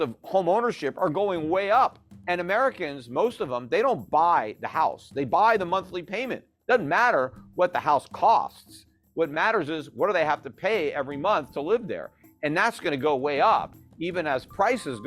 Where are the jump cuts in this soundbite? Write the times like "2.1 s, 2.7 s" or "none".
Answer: 2.1 s